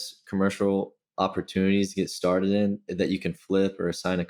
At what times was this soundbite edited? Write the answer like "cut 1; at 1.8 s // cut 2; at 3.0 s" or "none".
none

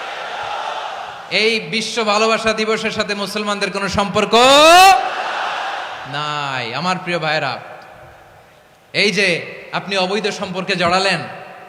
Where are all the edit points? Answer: none

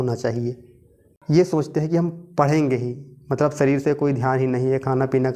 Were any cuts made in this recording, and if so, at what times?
cut 1; at 1.0 s

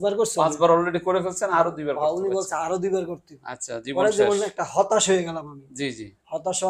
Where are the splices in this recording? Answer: none

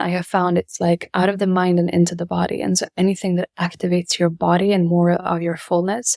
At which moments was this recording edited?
none

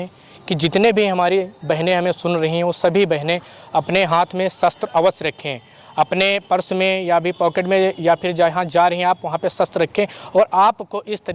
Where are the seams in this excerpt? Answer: none

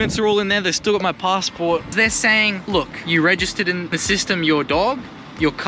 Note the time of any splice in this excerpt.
cut 1; at 1.9 s // cut 2; at 3.0 s // cut 3; at 4.0 s

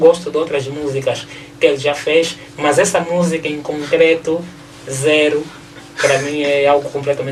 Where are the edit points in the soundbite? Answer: none

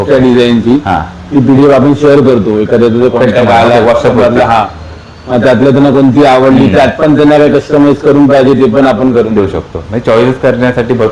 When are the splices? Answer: none

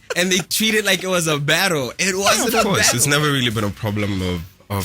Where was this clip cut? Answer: cut 1; at 2.6 s

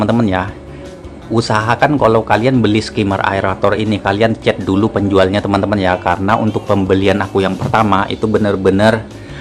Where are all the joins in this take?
none

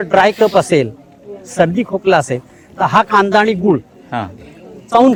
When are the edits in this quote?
none

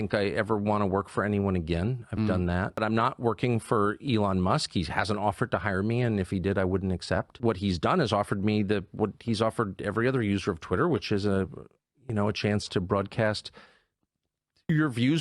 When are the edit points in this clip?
cut 1; at 2.8 s // cut 2; at 7.3 s

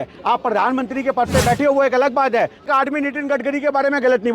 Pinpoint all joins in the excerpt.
cut 1; at 2.7 s

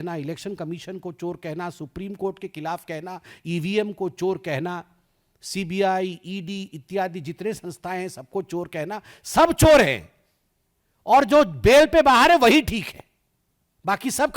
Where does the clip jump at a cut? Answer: none

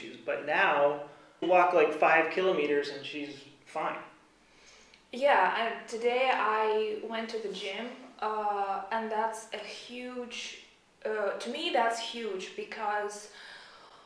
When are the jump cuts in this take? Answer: cut 1; at 1.4 s

